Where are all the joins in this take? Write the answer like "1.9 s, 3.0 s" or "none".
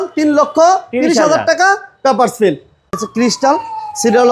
2.8 s